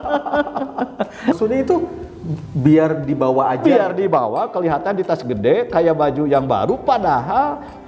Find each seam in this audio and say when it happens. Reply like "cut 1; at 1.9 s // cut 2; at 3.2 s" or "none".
cut 1; at 1.3 s